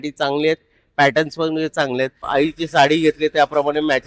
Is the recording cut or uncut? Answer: cut